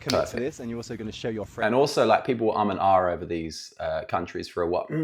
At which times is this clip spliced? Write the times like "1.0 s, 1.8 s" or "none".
none